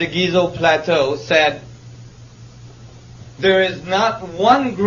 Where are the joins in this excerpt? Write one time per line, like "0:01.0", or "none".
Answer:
0:03.2